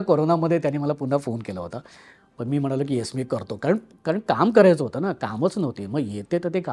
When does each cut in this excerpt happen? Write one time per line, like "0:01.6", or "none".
none